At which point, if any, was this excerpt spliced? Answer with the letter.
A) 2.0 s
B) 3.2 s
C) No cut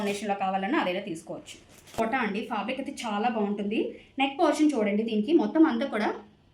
A